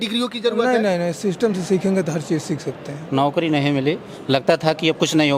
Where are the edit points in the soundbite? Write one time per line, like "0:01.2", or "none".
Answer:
0:03.0